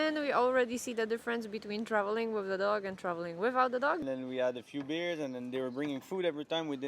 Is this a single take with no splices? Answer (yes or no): no